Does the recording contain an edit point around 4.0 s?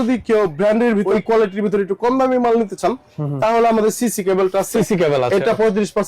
no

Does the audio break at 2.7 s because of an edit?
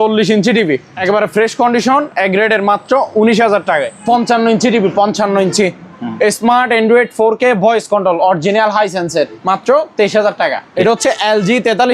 no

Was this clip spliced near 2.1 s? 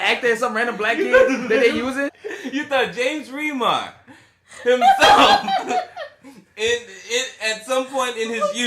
yes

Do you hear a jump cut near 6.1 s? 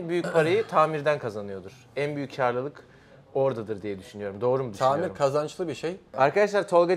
yes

